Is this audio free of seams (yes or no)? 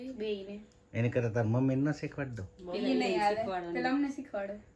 no